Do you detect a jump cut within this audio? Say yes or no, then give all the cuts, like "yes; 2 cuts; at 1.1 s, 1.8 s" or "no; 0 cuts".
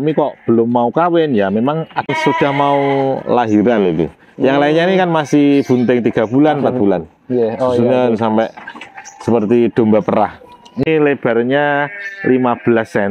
yes; 2 cuts; at 2.1 s, 10.9 s